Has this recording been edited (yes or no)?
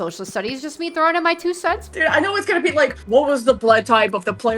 yes